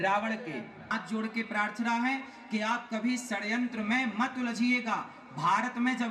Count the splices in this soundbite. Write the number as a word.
one